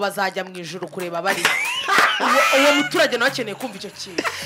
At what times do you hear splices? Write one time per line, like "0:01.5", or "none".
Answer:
none